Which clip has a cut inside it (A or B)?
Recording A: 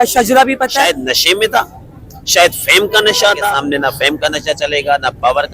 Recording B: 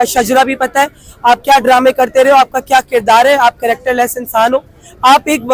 A